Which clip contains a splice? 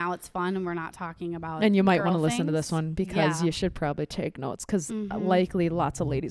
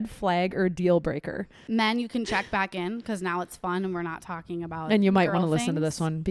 second; 1 cut; at 1.6 s

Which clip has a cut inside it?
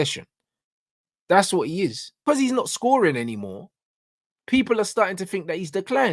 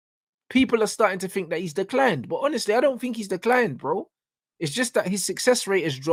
first; 1 cut; at 2.2 s

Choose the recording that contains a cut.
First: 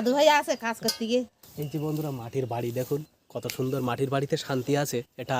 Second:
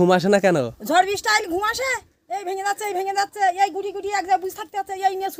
first; 1 cut; at 1.4 s

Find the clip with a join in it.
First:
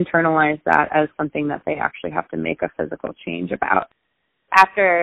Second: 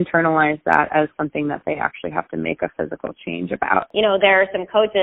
second; 1 cut; at 3.9 s

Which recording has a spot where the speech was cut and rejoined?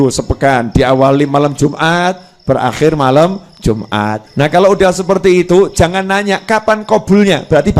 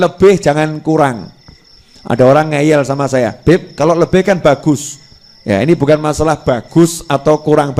first; 1 cut; at 4.2 s

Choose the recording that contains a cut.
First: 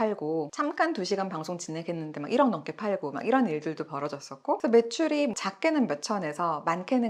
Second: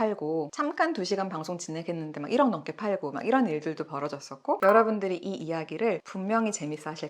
second; 1 cut; at 4.6 s

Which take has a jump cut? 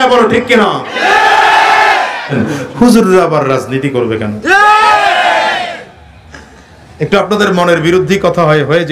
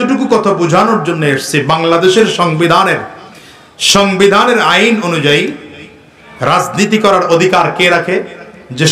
first; 1 cut; at 2.3 s

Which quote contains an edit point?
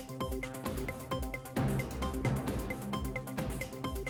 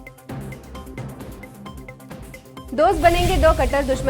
second; 2 cuts; at 0.9 s, 3.0 s

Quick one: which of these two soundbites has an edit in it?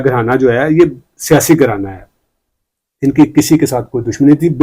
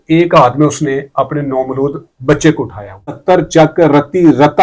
second; 1 cut; at 3.2 s

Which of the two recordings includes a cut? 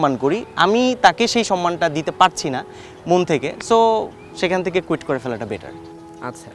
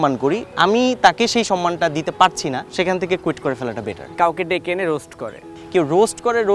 second; 3 cuts; at 2.6 s, 4.1 s, 5.6 s

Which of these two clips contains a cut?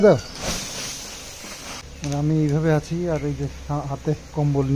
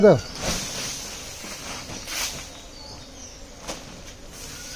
first; 1 cut; at 1.8 s

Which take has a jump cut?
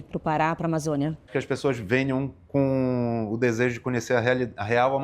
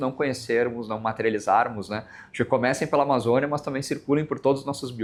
first; 1 cut; at 1.3 s

